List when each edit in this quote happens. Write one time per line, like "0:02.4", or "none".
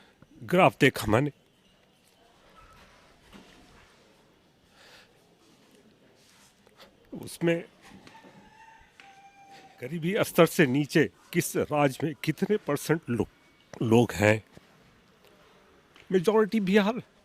0:09.9